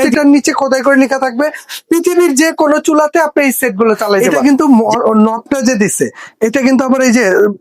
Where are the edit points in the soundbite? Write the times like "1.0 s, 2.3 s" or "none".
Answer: 4.3 s